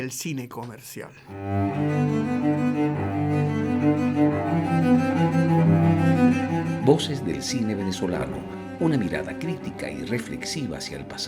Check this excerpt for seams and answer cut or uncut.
cut